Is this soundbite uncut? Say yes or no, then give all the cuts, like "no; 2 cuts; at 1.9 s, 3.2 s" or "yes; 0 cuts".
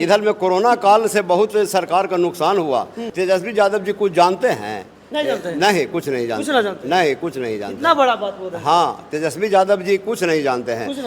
no; 1 cut; at 3.0 s